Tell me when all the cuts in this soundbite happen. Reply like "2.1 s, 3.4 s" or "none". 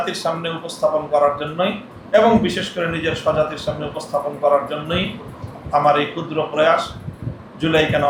none